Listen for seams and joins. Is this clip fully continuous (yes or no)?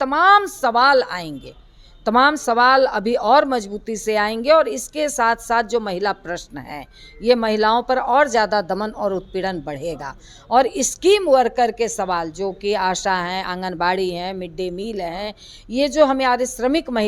yes